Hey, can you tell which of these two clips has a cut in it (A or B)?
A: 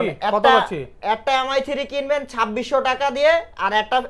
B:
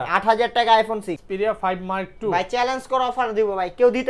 B